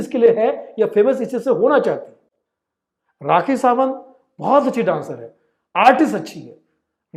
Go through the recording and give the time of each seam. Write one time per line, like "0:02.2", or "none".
none